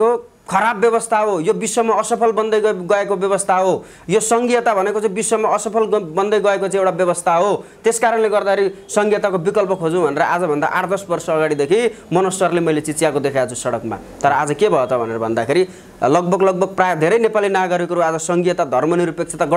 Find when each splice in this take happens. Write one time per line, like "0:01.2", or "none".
none